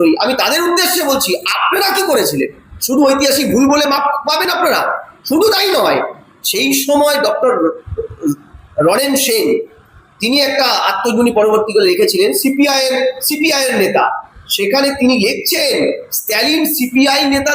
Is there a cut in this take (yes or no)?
no